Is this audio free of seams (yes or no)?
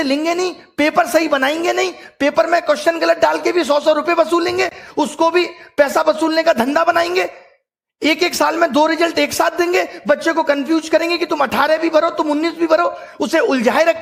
yes